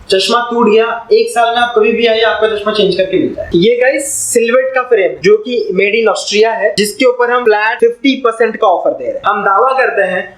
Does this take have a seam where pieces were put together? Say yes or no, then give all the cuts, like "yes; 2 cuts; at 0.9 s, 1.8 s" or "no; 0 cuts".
yes; 4 cuts; at 3.4 s, 5.2 s, 7.3 s, 9.2 s